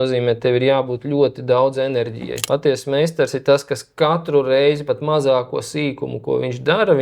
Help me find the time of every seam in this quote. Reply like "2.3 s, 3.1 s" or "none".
2.3 s